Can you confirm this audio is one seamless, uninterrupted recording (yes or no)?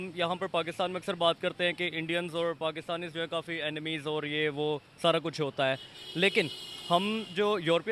yes